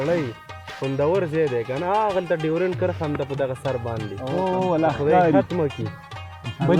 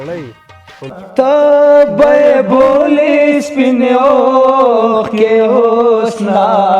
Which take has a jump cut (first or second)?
second